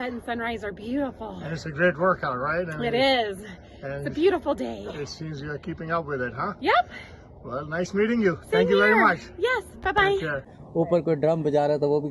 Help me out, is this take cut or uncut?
uncut